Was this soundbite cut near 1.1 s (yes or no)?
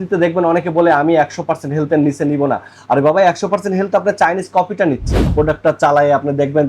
no